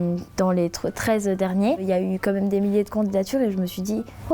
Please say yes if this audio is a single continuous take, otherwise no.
no